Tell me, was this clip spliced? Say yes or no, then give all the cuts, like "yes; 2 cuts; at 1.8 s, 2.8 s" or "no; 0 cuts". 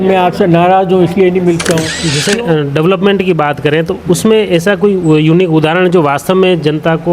yes; 1 cut; at 2.1 s